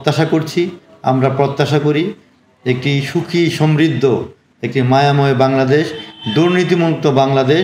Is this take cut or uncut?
uncut